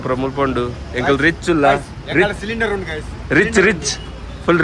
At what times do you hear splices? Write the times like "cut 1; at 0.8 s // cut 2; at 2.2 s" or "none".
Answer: none